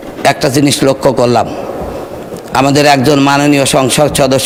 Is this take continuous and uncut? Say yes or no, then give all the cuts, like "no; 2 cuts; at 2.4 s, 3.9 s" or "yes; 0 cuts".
yes; 0 cuts